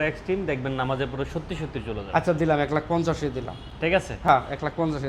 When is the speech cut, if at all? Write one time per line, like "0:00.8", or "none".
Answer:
none